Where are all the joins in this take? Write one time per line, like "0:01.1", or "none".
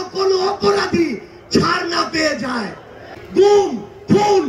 0:03.2

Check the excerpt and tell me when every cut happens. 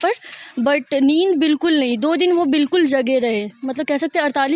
none

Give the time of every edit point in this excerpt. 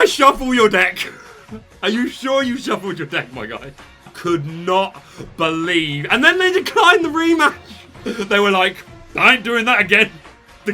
0:04.1

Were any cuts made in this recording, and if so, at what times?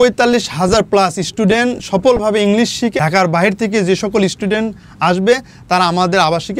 0:02.9

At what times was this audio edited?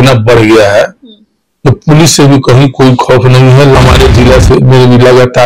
0:03.8

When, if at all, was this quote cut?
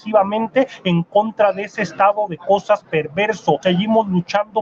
0:03.6

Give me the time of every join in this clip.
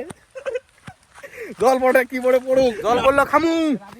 0:02.8

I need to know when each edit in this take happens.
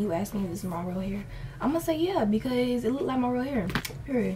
none

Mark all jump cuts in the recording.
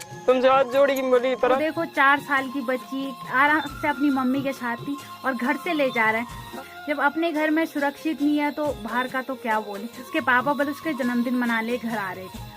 0:01.6
0:06.5
0:10.0

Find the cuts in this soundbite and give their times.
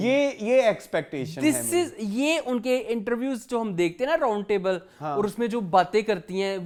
none

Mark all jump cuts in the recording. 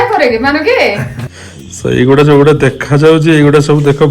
0:01.1

